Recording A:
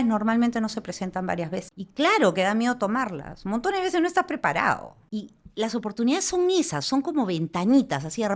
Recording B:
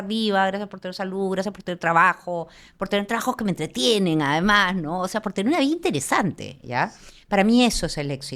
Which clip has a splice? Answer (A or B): A